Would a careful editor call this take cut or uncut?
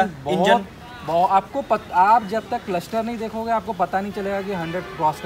uncut